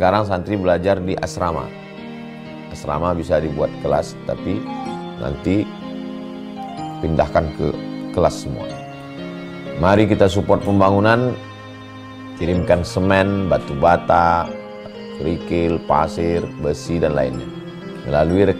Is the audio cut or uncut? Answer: uncut